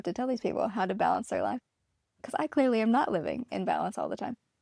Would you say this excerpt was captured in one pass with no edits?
yes; 0 cuts

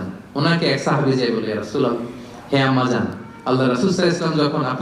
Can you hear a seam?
no; 0 cuts

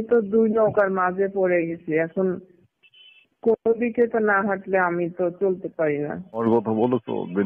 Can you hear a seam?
yes; 1 cut; at 6.4 s

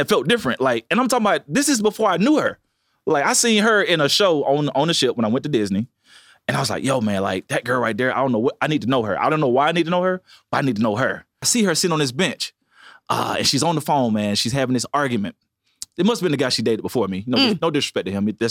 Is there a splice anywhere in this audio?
yes; 1 cut; at 11.5 s

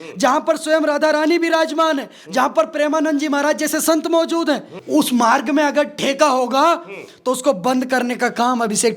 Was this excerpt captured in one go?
no; 1 cut; at 4.7 s

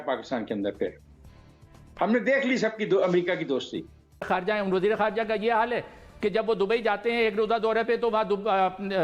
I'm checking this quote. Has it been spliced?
yes; 1 cut; at 4.3 s

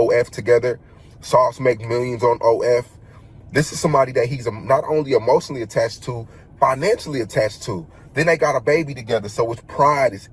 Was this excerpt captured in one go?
yes; 0 cuts

